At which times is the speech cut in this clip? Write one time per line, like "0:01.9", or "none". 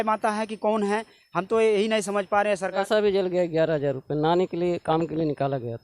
0:02.7